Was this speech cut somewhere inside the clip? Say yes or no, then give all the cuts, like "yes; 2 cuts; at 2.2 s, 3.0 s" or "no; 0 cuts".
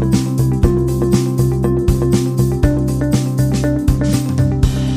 no; 0 cuts